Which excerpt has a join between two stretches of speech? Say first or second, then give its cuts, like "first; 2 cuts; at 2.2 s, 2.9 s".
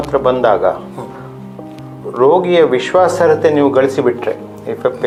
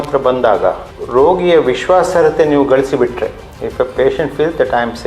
second; 1 cut; at 0.9 s